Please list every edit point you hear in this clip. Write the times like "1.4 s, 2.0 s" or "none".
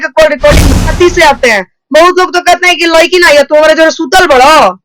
0.9 s